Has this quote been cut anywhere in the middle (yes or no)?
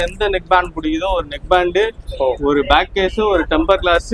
no